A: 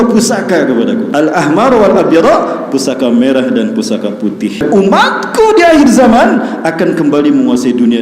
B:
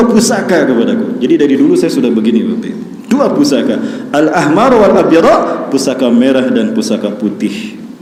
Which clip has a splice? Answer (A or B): A